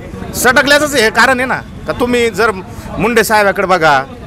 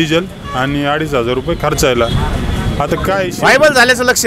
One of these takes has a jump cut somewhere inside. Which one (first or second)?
second